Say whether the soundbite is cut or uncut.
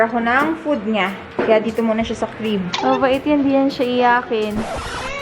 cut